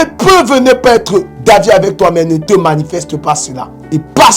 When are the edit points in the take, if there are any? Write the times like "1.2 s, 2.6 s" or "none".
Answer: 2.4 s